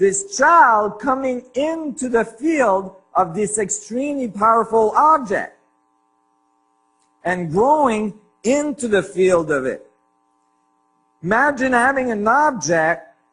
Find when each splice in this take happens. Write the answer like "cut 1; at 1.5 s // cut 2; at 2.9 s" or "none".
cut 1; at 4.3 s